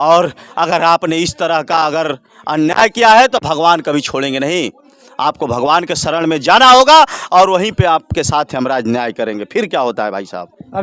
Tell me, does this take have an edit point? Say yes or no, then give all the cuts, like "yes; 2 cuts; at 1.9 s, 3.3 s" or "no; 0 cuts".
no; 0 cuts